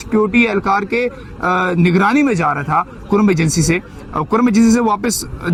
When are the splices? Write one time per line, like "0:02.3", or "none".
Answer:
none